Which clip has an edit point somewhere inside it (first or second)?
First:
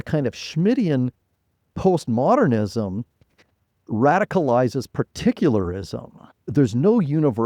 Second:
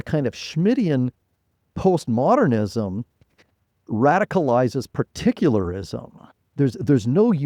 first